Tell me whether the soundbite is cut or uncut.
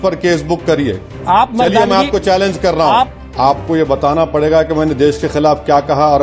cut